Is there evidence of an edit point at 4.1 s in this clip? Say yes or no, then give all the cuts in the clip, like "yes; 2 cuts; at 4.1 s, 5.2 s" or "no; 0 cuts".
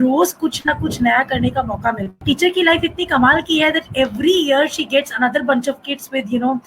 no; 1 cut; at 2.2 s